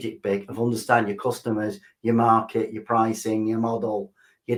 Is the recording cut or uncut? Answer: uncut